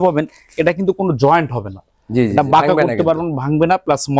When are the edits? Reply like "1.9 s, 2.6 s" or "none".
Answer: none